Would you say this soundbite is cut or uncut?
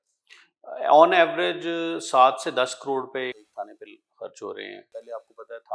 cut